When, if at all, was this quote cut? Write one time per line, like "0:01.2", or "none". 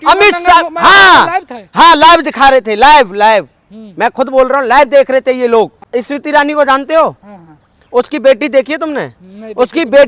0:05.8